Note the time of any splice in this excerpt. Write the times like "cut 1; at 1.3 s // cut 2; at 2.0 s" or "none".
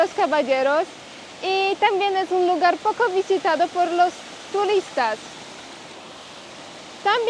none